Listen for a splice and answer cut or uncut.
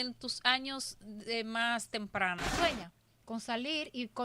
cut